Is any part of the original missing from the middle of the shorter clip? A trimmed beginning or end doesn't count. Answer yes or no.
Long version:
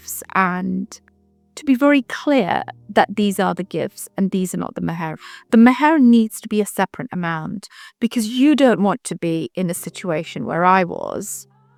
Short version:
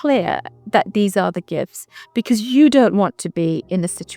yes